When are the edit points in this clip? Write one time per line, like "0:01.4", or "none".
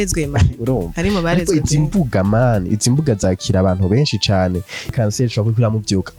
0:04.9